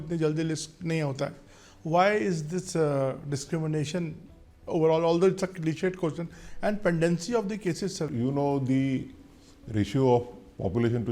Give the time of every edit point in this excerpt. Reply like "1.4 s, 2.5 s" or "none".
8.1 s